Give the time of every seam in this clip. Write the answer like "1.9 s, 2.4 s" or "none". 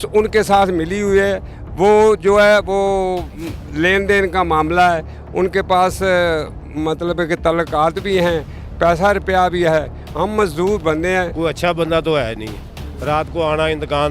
11.3 s

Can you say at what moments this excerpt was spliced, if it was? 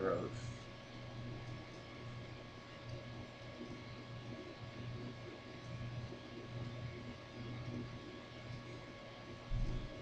none

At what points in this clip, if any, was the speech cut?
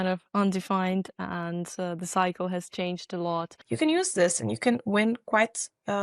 3.6 s

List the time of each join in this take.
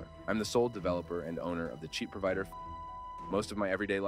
none

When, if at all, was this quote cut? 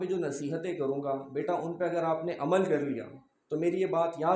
none

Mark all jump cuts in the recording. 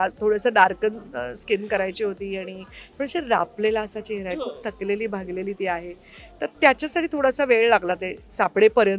none

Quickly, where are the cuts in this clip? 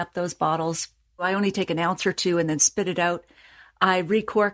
1.2 s

